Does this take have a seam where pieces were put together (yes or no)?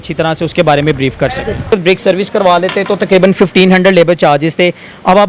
yes